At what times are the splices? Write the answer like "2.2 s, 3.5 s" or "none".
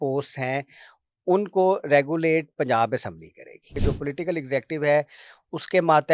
3.7 s